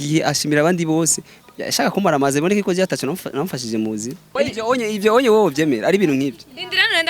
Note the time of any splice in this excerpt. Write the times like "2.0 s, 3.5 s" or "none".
4.2 s